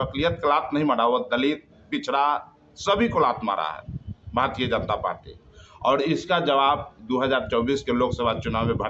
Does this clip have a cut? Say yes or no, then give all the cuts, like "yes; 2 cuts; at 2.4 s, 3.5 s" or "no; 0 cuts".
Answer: no; 0 cuts